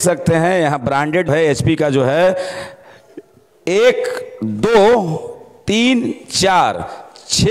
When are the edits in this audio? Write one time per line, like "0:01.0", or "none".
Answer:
0:01.3